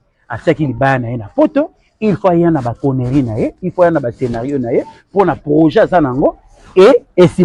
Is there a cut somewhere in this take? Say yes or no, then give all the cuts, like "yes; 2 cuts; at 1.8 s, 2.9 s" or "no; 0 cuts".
no; 0 cuts